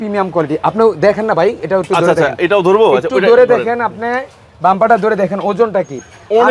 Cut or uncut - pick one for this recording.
uncut